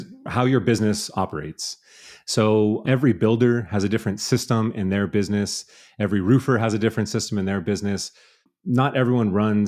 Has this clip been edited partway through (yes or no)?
no